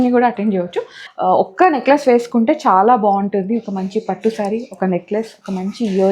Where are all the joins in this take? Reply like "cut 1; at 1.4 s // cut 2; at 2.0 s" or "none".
cut 1; at 1.0 s